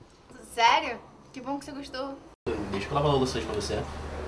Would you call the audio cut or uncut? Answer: cut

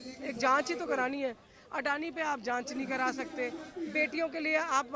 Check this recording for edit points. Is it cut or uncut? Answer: uncut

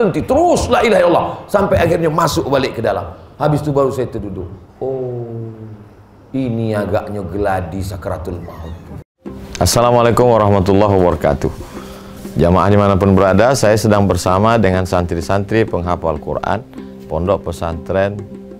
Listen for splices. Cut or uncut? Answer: cut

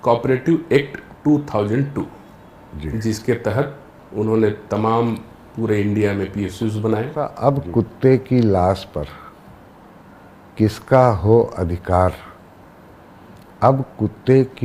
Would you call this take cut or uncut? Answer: cut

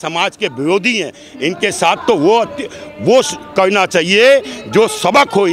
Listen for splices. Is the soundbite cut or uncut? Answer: uncut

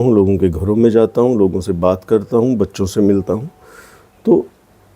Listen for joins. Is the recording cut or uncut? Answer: uncut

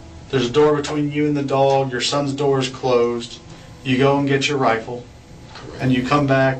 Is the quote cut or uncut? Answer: uncut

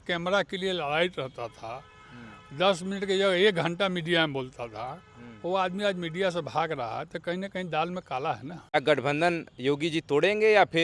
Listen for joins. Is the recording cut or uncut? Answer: cut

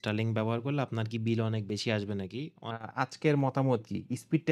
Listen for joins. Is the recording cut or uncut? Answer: cut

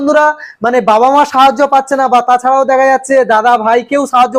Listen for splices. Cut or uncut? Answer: uncut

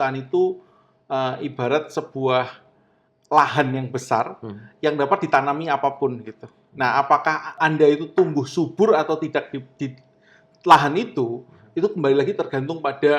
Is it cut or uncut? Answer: cut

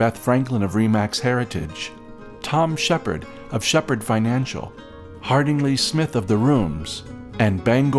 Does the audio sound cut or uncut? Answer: uncut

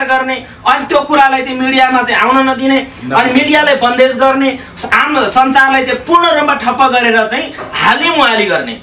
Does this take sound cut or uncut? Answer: uncut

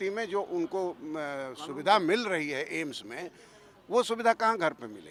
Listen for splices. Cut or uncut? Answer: uncut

